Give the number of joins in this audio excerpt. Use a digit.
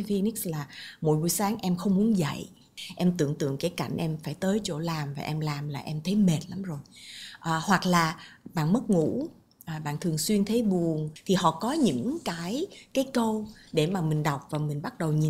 1